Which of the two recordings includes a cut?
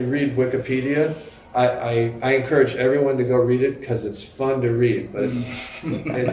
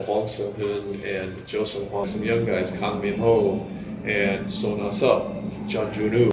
second; 1 cut; at 2.1 s

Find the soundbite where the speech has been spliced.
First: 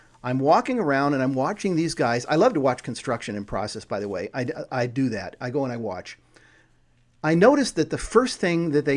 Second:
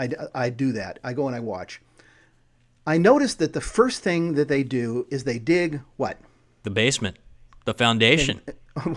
second; 1 cut; at 6.6 s

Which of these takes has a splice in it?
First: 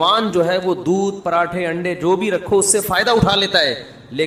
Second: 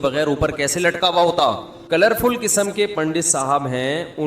second; 1 cut; at 1.7 s

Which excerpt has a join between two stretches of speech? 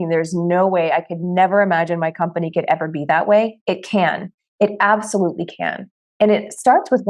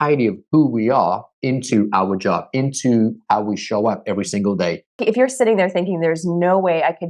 second; 1 cut; at 5.0 s

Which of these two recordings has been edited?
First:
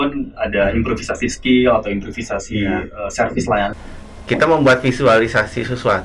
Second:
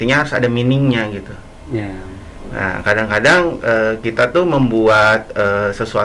first; 1 cut; at 3.7 s

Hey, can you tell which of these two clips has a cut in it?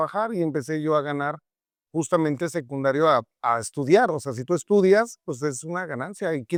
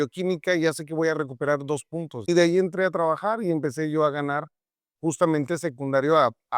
second; 1 cut; at 2.1 s

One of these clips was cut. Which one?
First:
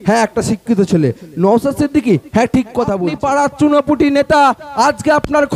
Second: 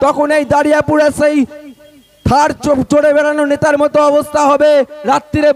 first; 1 cut; at 3.0 s

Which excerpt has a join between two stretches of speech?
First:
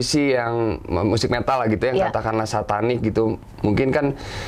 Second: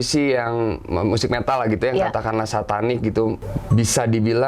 second; 1 cut; at 3.5 s

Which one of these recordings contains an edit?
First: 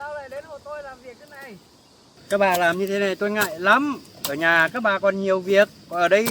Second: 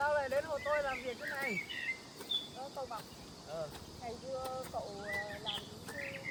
first; 1 cut; at 2.1 s

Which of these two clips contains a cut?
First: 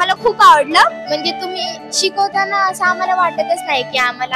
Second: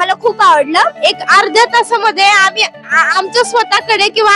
second; 1 cut; at 0.9 s

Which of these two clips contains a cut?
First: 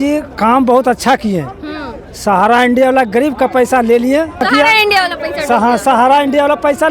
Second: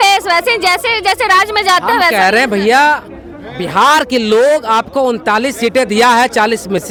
first; 1 cut; at 4.4 s

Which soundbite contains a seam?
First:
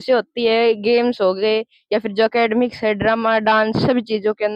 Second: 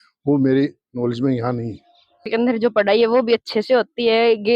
second; 1 cut; at 2.3 s

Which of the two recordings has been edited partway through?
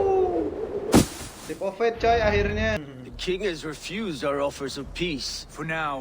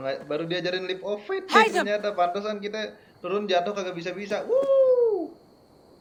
first; 1 cut; at 2.9 s

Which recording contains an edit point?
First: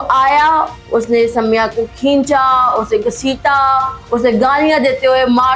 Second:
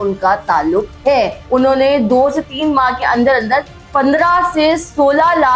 second; 1 cut; at 1.4 s

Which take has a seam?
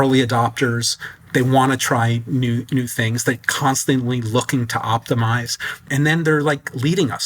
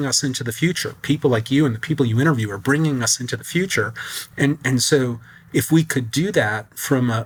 first; 2 cuts; at 1.1 s, 5.8 s

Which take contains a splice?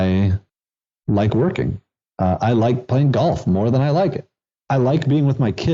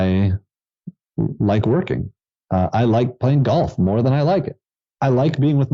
first; 1 cut; at 1.0 s

